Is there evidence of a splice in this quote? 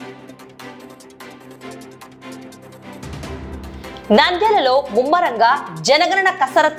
no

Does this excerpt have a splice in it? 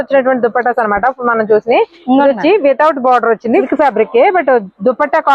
yes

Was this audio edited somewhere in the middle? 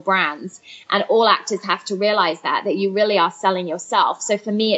no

